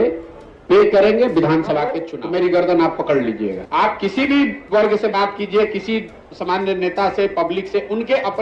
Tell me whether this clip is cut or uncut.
cut